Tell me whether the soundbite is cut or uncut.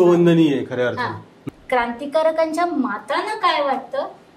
cut